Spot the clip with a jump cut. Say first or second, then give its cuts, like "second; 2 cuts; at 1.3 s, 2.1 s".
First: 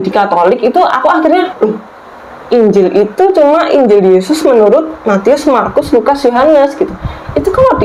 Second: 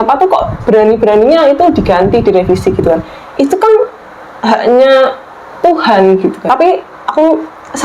second; 1 cut; at 6.4 s